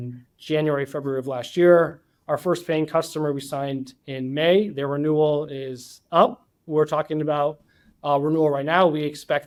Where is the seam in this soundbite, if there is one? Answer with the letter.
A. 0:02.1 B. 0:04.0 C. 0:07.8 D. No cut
D